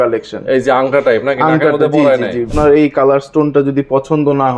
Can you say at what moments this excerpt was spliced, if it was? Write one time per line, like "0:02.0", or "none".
0:02.5